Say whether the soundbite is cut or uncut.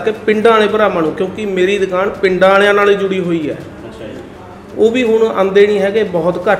uncut